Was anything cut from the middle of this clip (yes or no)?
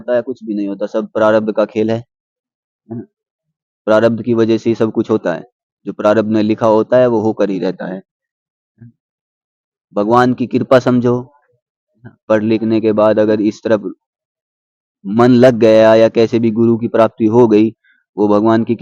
no